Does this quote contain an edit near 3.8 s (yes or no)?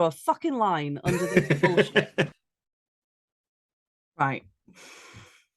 no